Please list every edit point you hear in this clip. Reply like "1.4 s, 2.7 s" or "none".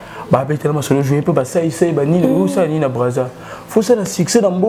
none